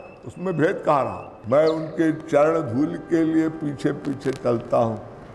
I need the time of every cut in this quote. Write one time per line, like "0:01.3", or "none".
0:01.4